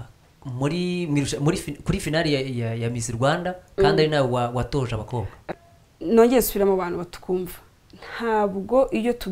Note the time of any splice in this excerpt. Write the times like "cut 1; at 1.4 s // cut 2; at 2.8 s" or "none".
cut 1; at 5.4 s

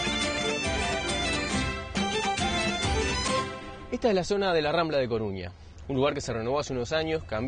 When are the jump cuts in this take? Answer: none

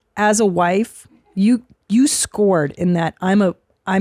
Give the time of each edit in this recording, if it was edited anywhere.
none

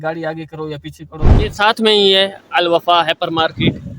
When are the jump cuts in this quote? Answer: cut 1; at 1.5 s

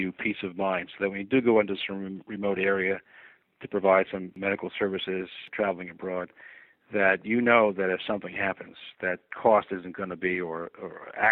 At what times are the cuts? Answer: cut 1; at 4.3 s // cut 2; at 5.4 s // cut 3; at 9.3 s

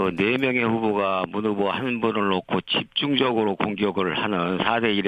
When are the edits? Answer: cut 1; at 3.5 s

